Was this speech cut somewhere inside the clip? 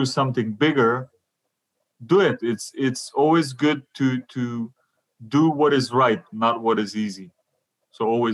no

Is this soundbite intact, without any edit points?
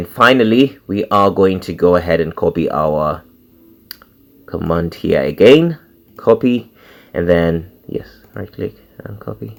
yes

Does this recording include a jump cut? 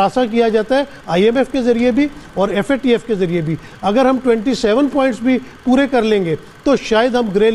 no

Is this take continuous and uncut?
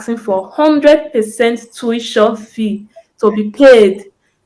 yes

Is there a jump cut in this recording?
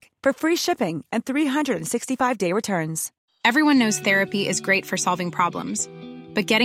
yes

